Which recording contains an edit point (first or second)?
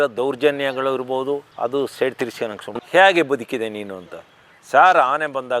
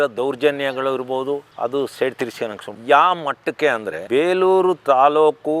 first